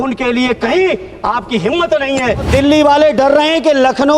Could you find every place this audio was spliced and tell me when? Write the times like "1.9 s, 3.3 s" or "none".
2.5 s